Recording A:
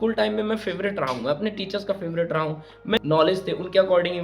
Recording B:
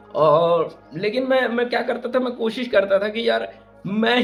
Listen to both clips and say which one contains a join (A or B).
A